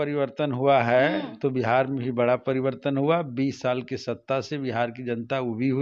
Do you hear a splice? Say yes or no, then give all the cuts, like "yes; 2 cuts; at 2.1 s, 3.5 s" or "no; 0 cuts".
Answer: no; 0 cuts